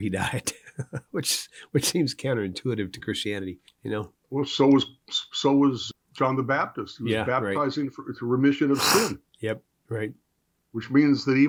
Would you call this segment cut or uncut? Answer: uncut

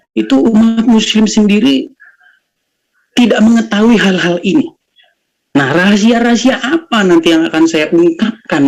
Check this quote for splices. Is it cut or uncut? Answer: uncut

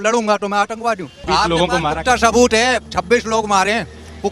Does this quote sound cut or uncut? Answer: cut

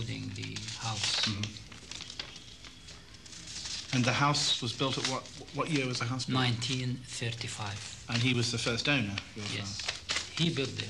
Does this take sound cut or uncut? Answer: uncut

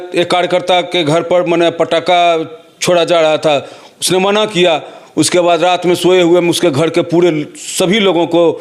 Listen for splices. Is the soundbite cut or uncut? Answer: uncut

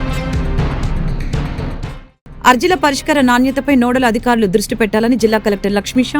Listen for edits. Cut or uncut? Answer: cut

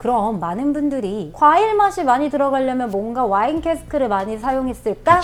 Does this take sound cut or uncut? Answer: uncut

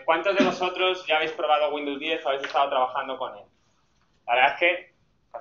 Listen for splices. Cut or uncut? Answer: cut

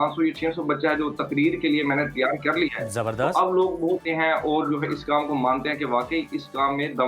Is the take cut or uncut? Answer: cut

